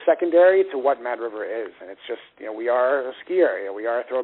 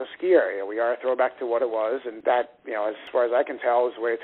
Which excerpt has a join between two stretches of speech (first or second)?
second